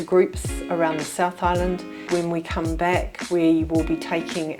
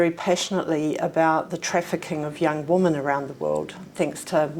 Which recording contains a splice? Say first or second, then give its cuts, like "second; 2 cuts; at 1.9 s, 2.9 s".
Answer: first; 1 cut; at 2.0 s